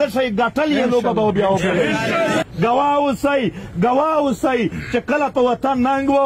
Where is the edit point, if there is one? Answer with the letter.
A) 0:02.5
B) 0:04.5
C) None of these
A